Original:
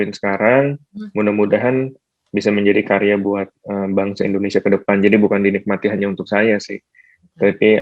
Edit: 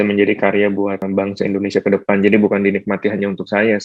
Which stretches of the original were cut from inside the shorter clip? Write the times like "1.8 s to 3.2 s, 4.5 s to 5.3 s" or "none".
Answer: 3.5 s to 3.8 s